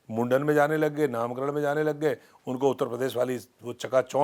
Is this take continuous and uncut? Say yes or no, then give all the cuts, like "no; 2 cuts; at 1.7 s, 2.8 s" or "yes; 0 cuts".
yes; 0 cuts